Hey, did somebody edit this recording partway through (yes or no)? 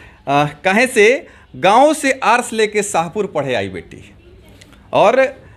no